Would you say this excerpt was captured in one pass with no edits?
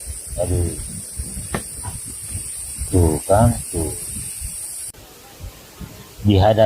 no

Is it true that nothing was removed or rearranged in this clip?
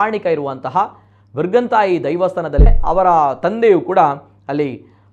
no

